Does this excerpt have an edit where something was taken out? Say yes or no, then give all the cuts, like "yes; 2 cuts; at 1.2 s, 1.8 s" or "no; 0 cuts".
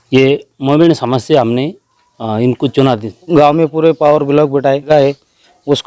yes; 2 cuts; at 3.3 s, 4.9 s